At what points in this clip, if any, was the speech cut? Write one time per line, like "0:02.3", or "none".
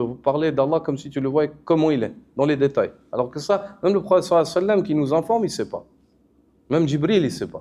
none